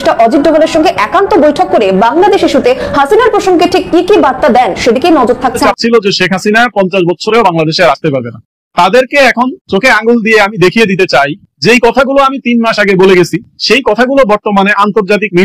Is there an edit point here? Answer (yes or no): yes